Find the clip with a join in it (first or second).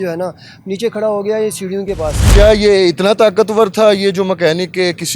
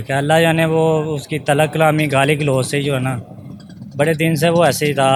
first